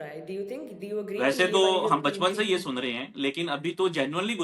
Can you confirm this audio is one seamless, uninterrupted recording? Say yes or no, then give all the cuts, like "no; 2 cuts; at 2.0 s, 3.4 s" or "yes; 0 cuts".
yes; 0 cuts